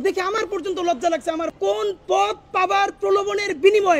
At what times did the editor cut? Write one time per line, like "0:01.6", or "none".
0:01.5